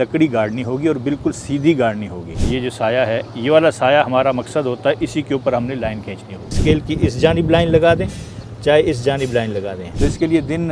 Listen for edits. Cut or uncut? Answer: cut